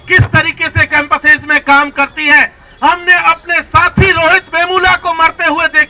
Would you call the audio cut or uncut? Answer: uncut